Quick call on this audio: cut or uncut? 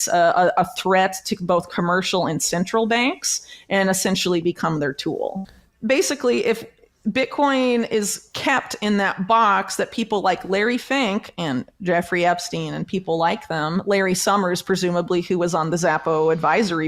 cut